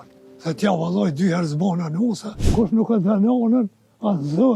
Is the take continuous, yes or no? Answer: no